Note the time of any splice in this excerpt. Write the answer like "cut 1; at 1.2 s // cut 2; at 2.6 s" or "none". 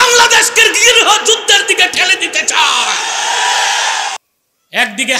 cut 1; at 4.2 s